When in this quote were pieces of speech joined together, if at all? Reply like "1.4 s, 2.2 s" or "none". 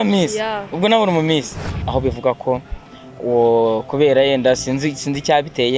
1.7 s